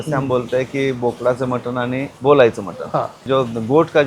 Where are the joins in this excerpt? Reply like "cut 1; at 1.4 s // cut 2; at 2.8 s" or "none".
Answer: cut 1; at 2.1 s